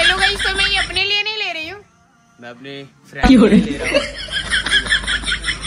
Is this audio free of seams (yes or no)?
yes